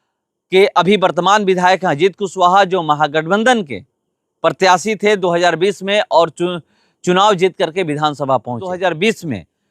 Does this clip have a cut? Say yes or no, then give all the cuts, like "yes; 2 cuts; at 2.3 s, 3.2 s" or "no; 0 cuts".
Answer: yes; 1 cut; at 8.7 s